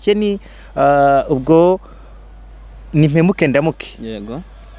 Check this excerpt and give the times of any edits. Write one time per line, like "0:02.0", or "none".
none